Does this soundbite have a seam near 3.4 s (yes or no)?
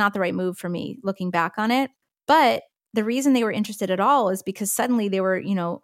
no